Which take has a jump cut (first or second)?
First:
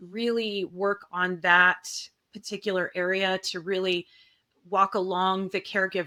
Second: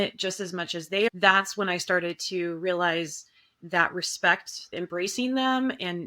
second